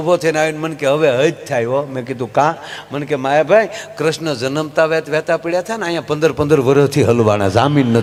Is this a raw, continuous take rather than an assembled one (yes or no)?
yes